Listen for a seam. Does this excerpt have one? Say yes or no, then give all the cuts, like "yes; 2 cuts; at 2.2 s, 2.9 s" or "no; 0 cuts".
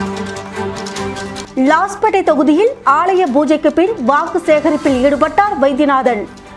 yes; 1 cut; at 0.9 s